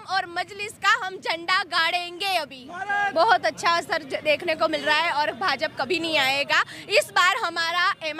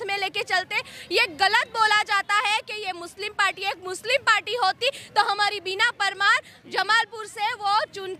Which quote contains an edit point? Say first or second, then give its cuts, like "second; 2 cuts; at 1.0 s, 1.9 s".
first; 1 cut; at 3.1 s